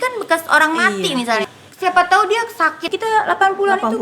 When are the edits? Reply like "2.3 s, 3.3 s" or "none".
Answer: 1.4 s, 2.9 s